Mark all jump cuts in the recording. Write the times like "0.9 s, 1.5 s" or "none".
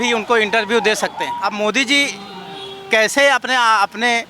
1.3 s

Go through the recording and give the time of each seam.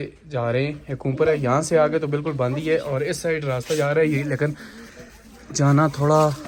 none

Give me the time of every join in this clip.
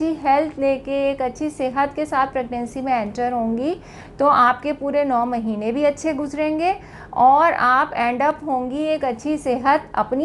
none

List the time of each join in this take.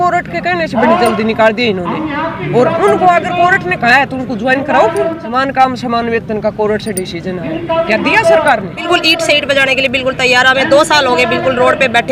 5.2 s, 8.8 s

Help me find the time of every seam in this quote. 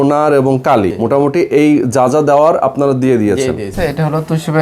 0.9 s, 3.7 s

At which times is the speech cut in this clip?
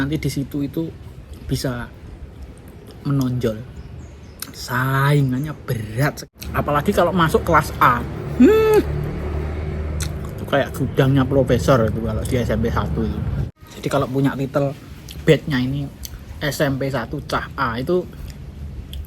6.2 s, 13.4 s

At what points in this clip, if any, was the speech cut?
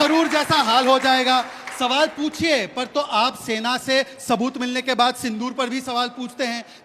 1.6 s

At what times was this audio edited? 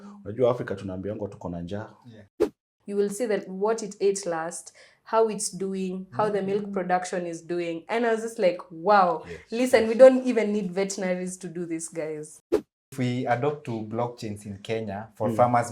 2.6 s, 12.8 s

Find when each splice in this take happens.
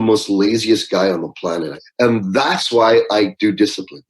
1.8 s

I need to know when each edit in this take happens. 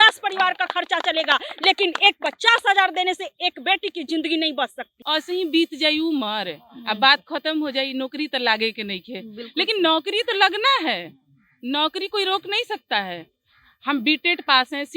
5.0 s

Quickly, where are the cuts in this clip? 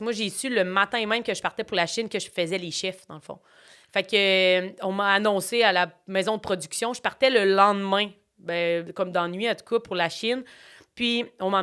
none

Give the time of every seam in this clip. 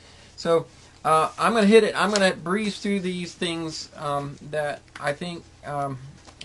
none

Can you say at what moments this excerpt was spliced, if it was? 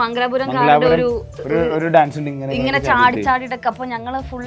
none

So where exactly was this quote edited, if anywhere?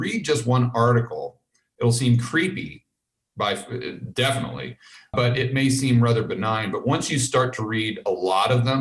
1.6 s, 5.1 s

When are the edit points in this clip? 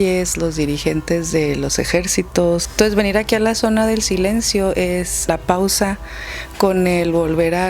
2.6 s, 5.3 s

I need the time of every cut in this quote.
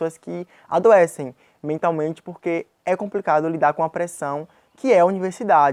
none

